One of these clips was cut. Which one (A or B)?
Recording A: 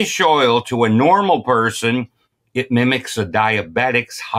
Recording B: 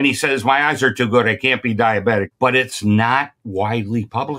B